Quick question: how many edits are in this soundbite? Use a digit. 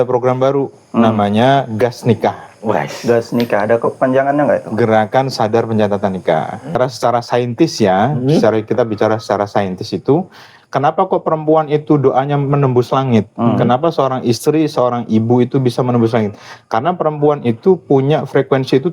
1